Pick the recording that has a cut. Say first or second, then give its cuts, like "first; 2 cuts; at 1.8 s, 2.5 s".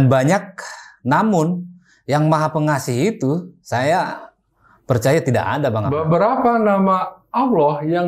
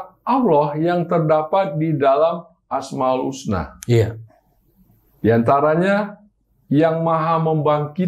first; 1 cut; at 5.9 s